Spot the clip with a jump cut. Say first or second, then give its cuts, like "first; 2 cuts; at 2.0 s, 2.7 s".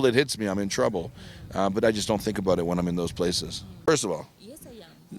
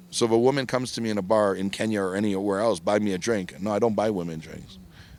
first; 1 cut; at 3.9 s